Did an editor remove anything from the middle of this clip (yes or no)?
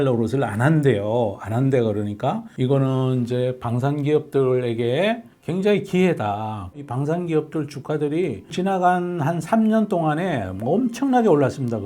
yes